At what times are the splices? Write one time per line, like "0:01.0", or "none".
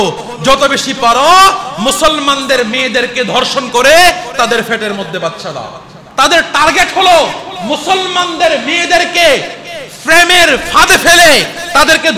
0:06.0